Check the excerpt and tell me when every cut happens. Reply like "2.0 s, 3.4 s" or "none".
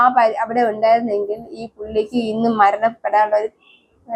none